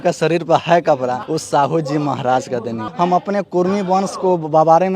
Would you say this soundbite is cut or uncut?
cut